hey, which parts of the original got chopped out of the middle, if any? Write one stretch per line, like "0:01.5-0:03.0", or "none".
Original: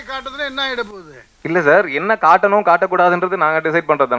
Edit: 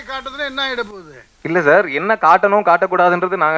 none